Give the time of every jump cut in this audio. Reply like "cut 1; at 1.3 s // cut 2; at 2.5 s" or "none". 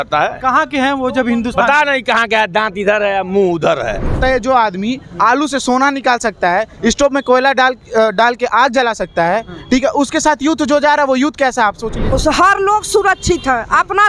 cut 1; at 4.2 s // cut 2; at 12.1 s